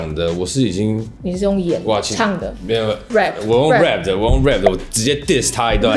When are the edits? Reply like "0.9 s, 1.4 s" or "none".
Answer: none